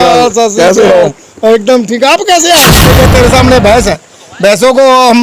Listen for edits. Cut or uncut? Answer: cut